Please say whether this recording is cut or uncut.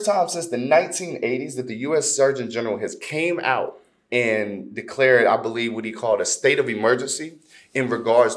uncut